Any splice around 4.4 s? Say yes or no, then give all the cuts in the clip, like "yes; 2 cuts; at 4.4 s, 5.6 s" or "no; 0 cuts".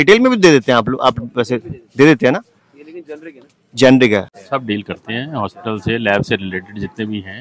yes; 1 cut; at 4.4 s